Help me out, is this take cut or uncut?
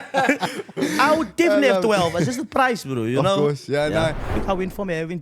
cut